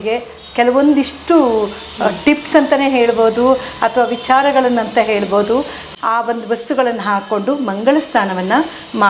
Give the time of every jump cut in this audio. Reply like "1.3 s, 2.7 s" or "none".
5.9 s